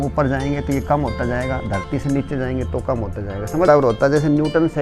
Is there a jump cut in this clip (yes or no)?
yes